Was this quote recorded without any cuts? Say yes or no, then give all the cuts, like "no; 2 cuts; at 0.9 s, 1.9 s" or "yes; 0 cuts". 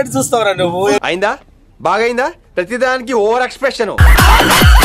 no; 1 cut; at 1.0 s